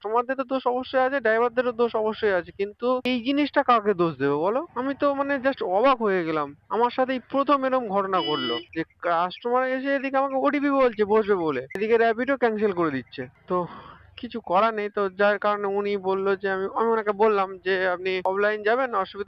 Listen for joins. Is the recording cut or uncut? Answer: uncut